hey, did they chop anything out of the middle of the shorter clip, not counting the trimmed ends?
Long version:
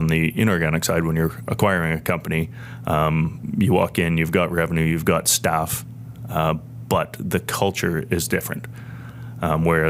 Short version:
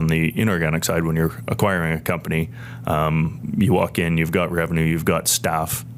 no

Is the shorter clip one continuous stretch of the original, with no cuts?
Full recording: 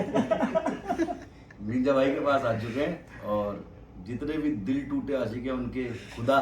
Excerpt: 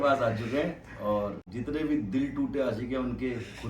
no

